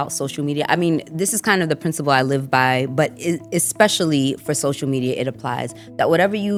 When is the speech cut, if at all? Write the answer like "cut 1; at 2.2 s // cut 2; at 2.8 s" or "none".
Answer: none